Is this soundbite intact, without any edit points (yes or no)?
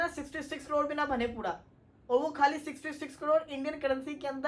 yes